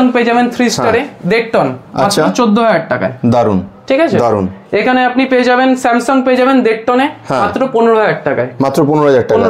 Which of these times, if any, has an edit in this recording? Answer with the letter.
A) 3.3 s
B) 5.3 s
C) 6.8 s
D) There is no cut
D